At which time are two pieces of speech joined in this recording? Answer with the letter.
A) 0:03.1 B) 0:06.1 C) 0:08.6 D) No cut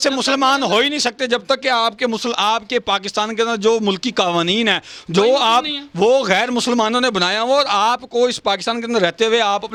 D